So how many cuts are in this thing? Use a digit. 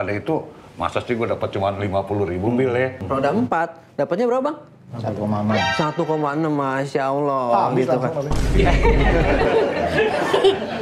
1